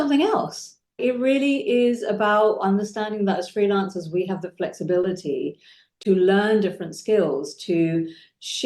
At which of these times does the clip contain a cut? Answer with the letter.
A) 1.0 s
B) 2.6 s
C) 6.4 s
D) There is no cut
A